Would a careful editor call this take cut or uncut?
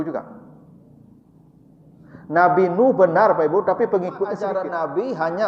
cut